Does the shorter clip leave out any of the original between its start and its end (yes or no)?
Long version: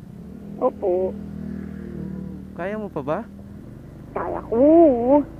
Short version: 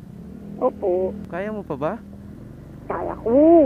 yes